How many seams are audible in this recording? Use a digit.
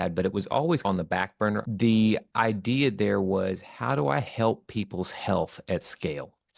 1